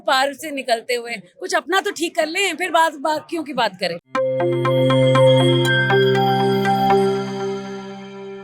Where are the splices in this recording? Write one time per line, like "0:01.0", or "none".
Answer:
0:04.0